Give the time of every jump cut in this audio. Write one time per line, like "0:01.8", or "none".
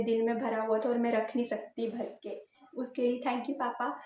0:02.6